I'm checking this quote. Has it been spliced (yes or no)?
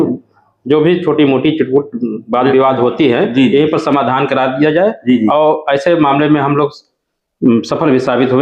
no